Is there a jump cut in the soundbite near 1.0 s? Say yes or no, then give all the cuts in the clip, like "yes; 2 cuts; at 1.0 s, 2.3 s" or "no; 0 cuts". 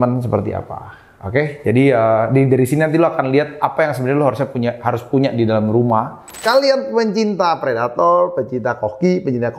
no; 1 cut; at 6.4 s